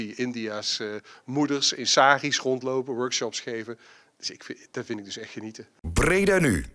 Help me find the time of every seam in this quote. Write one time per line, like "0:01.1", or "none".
0:05.6

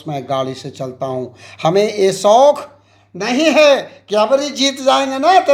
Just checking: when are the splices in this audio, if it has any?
none

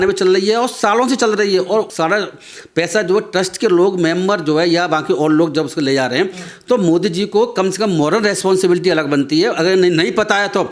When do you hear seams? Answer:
none

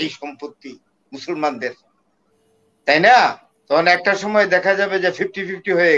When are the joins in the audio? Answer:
0:03.5

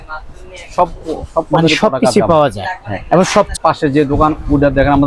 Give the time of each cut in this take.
0:03.5

